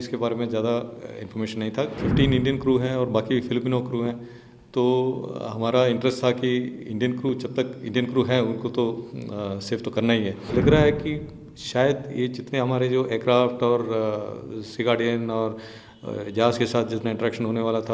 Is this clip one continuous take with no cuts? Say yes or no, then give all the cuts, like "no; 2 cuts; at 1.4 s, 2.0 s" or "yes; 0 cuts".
no; 2 cuts; at 2.0 s, 10.5 s